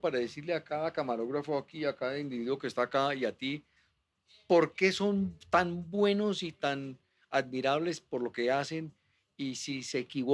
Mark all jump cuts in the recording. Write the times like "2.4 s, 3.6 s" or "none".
none

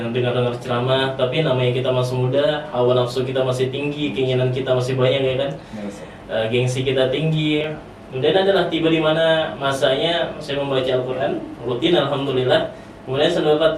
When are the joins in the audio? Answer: none

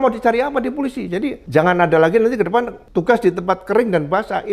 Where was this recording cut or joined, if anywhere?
1.4 s, 2.8 s

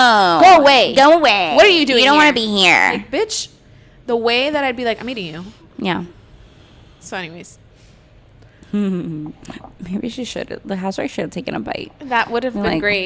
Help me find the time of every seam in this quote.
none

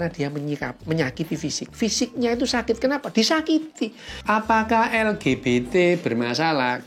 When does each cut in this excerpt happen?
4.1 s

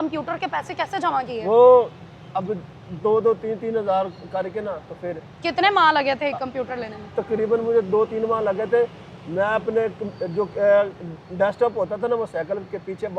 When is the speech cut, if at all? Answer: none

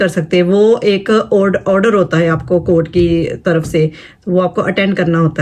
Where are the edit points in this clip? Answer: none

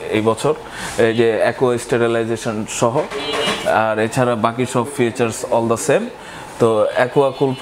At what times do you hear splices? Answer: none

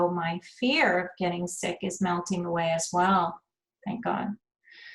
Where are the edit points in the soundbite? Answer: none

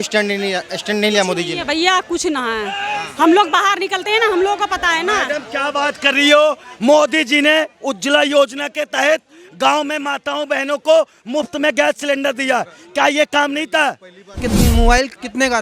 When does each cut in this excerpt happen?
14.4 s

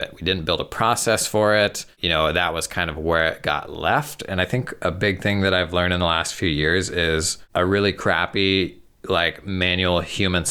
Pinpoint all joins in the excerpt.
1.9 s, 7.4 s

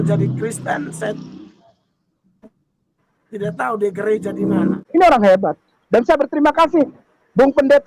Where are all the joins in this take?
4.7 s

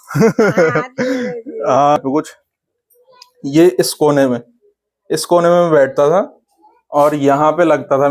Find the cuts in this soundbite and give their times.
2.0 s

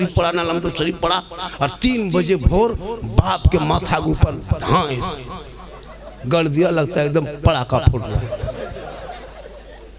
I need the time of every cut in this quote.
none

